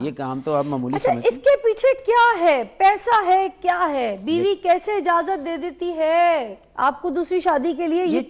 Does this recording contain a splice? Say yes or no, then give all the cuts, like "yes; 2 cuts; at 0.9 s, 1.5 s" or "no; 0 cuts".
no; 0 cuts